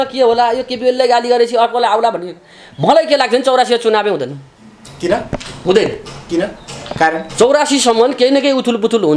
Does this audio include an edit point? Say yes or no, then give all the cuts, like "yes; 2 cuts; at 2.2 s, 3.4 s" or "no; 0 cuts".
no; 0 cuts